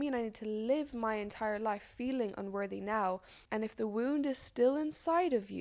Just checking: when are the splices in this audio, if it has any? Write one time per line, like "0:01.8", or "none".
0:03.3